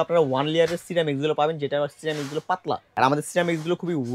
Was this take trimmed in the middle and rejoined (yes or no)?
yes